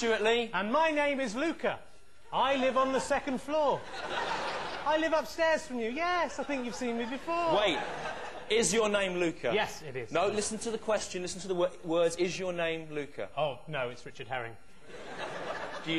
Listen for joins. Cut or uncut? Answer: uncut